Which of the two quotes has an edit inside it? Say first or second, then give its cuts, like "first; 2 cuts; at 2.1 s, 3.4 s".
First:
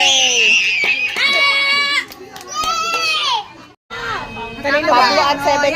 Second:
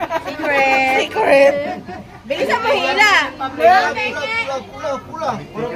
first; 1 cut; at 3.8 s